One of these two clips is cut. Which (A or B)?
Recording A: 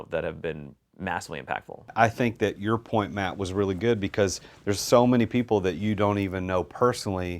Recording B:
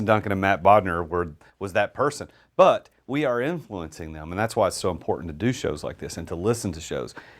A